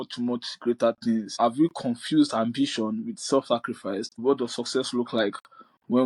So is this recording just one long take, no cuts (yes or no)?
no